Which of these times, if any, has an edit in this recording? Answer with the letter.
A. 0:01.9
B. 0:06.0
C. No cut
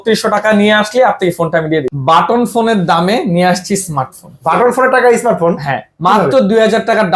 A